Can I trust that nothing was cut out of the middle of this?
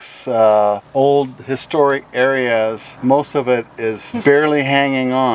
no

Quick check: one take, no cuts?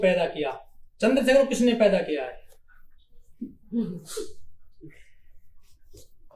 yes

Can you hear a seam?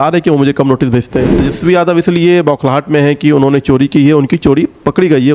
yes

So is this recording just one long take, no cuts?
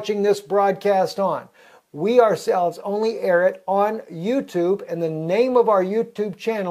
no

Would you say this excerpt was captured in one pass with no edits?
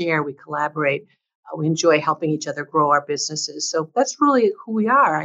yes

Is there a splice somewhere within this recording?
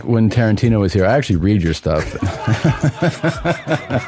yes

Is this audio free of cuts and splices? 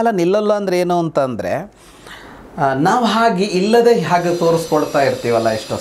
yes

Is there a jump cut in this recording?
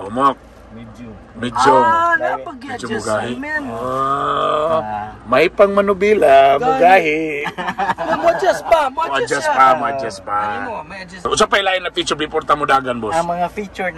no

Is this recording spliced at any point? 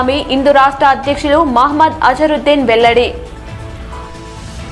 no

